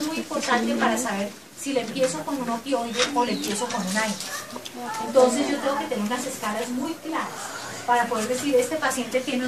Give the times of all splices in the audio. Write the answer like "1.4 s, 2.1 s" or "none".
6.0 s